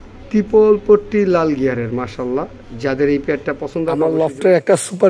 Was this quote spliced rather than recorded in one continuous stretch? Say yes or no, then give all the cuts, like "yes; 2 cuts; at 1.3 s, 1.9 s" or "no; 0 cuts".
yes; 1 cut; at 4.0 s